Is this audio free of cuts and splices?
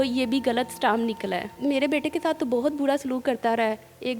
no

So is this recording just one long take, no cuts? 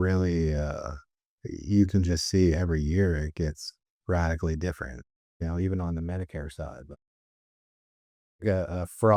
yes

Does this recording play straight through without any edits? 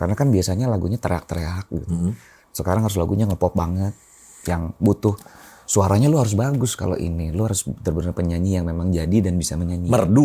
yes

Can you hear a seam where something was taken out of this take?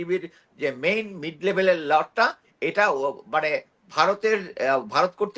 no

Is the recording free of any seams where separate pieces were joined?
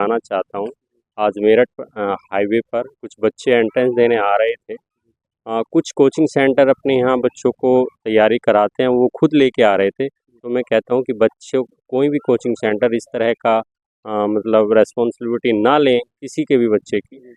yes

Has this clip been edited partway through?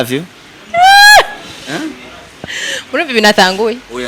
no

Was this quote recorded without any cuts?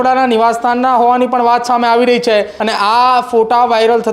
no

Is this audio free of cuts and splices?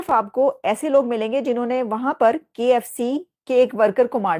yes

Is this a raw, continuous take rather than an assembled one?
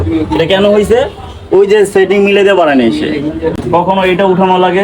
no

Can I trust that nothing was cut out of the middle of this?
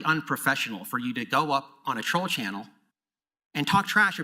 yes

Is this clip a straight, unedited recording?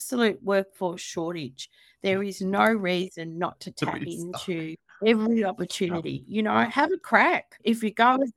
yes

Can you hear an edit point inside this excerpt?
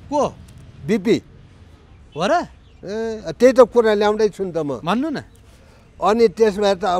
no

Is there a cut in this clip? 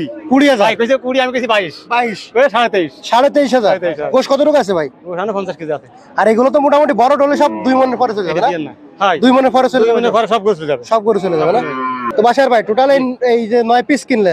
no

